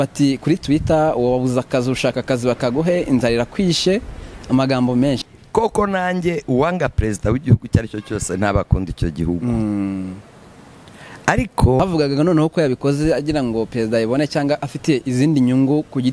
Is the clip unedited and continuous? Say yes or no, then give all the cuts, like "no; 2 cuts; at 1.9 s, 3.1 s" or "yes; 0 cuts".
no; 2 cuts; at 5.2 s, 11.8 s